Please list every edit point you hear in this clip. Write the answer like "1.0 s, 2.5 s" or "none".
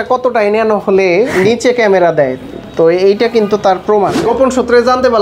4.2 s